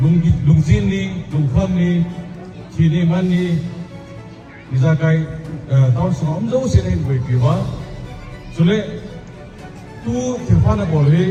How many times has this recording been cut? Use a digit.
0